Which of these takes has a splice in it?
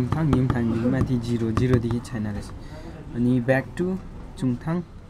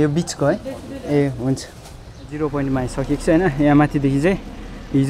second; 1 cut; at 2.3 s

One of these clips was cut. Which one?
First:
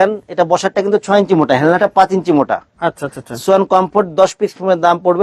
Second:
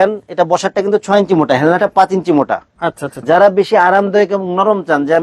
second; 1 cut; at 3.1 s

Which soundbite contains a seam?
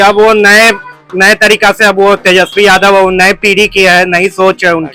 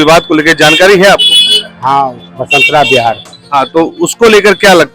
second; 2 cuts; at 2.3 s, 3.3 s

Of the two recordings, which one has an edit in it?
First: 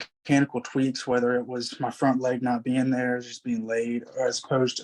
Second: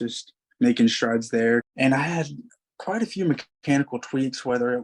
second; 1 cut; at 1.7 s

